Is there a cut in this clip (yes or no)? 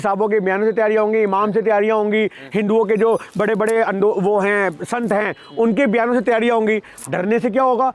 yes